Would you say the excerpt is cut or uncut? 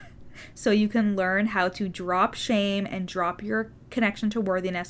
cut